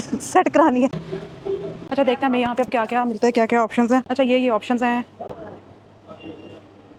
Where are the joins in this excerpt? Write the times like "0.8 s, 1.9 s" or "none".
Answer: none